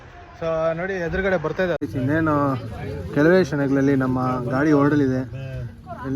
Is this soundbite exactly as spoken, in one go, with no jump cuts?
no; 1 cut; at 1.8 s

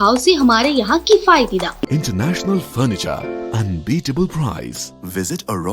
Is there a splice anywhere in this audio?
yes; 1 cut; at 1.9 s

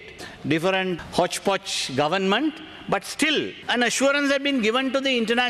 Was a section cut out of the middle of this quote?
no; 0 cuts

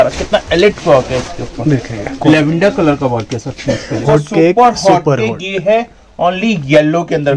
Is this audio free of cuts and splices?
no; 1 cut; at 4.0 s

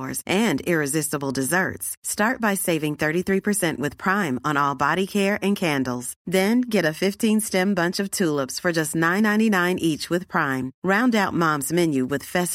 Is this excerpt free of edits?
yes; 0 cuts

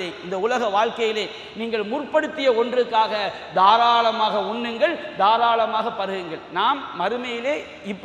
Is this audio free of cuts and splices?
yes; 0 cuts

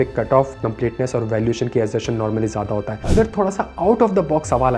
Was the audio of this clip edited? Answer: yes; 1 cut; at 3.1 s

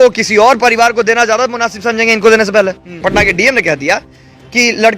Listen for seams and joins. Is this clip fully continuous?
no; 1 cut; at 2.9 s

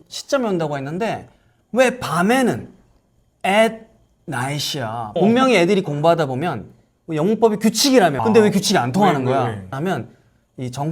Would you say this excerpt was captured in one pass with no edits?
yes; 0 cuts

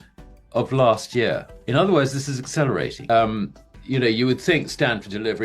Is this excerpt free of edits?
no; 1 cut; at 3.0 s

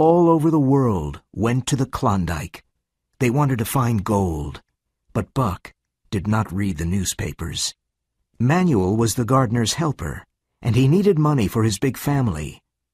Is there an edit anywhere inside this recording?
yes; 1 cut; at 10.8 s

